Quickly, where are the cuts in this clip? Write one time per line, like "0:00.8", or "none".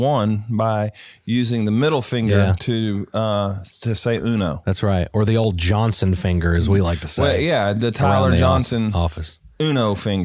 none